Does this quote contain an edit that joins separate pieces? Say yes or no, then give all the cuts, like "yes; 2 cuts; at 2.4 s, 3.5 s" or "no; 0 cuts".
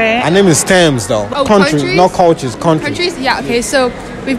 yes; 1 cut; at 1.3 s